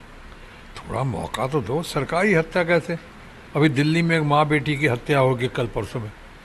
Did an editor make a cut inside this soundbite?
no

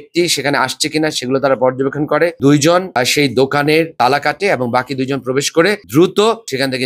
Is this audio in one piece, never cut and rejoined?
no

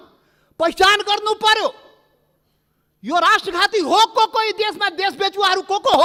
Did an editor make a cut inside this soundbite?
no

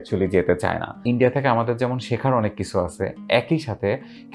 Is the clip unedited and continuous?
no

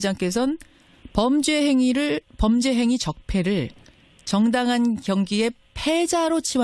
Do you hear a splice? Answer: no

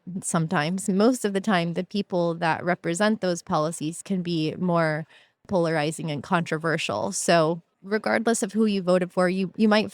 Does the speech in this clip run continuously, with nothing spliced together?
no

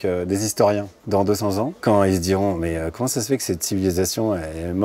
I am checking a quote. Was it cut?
yes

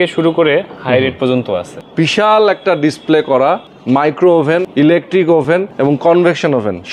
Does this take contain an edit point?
yes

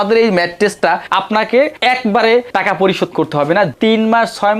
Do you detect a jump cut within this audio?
yes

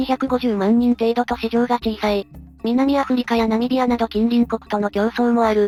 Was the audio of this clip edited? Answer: no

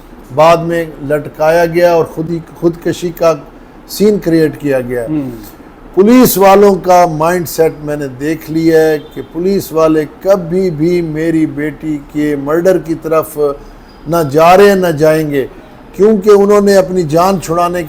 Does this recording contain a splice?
no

